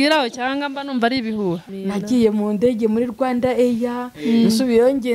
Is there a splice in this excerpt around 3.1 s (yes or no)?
no